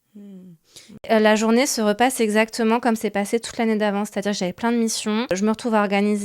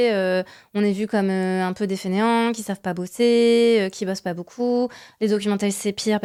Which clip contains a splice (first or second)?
first